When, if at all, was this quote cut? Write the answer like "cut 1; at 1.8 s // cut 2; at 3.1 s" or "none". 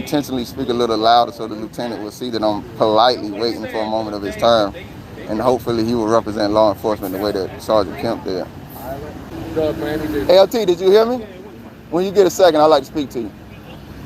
cut 1; at 9.2 s

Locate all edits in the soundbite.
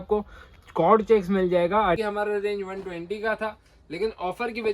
cut 1; at 2.0 s

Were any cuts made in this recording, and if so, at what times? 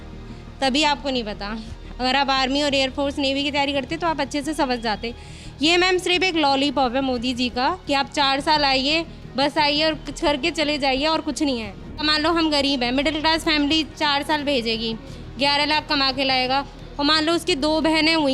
cut 1; at 12.0 s

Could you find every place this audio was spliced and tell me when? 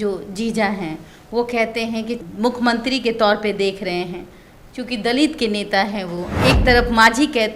cut 1; at 2.2 s

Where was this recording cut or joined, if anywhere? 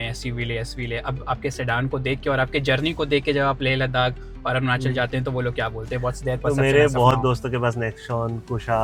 none

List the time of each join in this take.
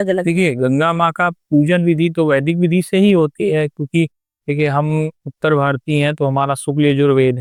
none

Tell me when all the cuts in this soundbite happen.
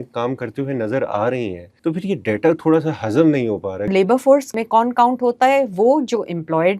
cut 1; at 1.6 s // cut 2; at 3.9 s // cut 3; at 4.6 s

